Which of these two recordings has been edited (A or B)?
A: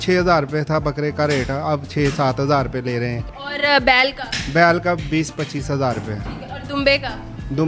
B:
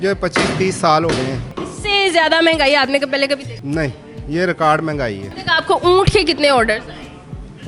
B